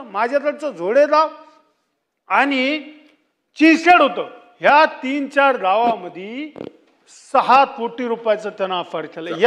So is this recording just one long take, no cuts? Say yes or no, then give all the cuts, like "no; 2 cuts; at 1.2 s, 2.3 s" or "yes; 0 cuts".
yes; 0 cuts